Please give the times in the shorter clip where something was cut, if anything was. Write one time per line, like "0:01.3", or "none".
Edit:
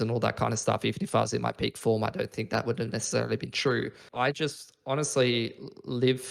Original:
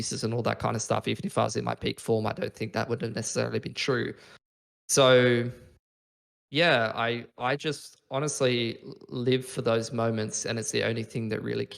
0:04.0

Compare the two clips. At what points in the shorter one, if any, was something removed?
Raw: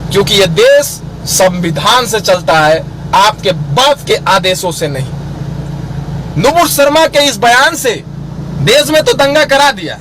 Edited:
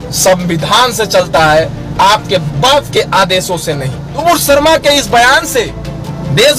0:04.2

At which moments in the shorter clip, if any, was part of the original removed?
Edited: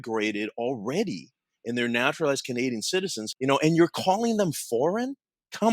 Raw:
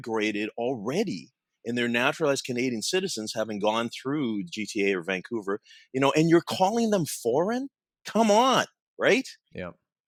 0:03.2

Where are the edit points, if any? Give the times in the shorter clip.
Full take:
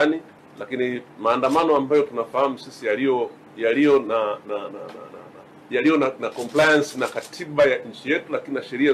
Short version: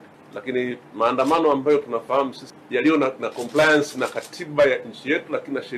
0:02.4

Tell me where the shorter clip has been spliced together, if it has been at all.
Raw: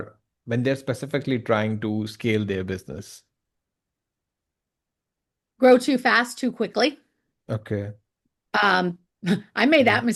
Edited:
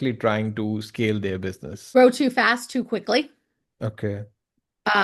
0:01.7

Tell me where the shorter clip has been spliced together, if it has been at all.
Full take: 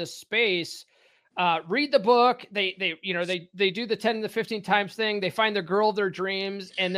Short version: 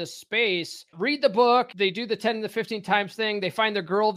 0:00.9
0:01.7

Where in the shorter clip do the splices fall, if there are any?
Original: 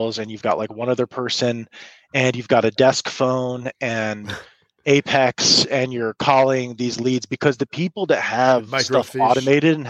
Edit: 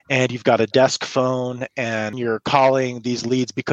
0:02.2

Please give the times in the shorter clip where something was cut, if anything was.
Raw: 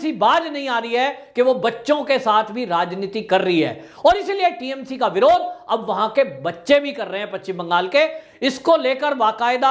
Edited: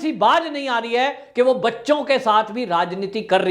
none

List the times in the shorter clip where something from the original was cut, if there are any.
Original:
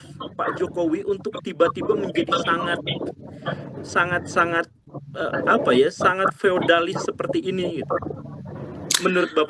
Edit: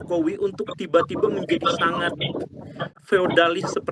0:03.0

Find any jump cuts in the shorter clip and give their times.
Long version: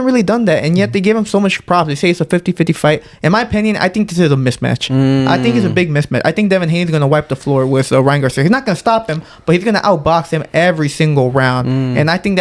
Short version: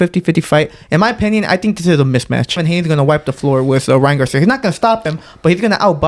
0:02.6

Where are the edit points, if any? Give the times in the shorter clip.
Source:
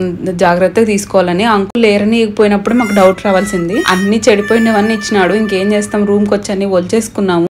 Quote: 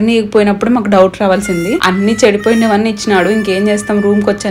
none

